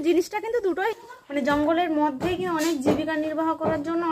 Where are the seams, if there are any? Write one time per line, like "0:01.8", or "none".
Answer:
0:01.0